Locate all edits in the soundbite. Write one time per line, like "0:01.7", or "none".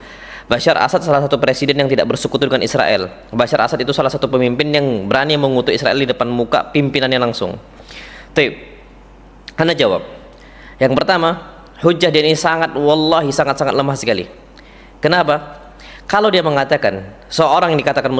none